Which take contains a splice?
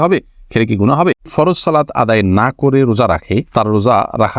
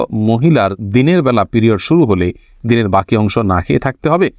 first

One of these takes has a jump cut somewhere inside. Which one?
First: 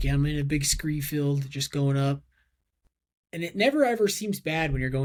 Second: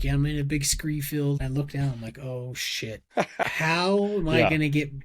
second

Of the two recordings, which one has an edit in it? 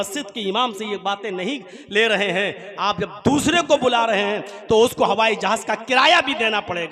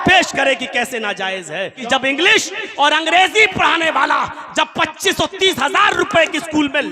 second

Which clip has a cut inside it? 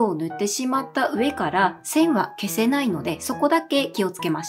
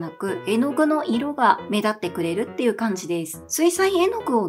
second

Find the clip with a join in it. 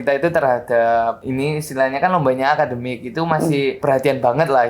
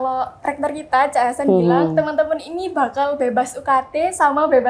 first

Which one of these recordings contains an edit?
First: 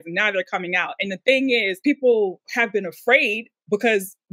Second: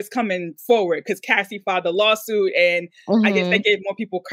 first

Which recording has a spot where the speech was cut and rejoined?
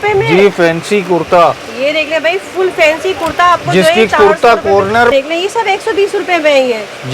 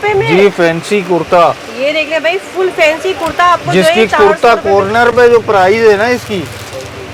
first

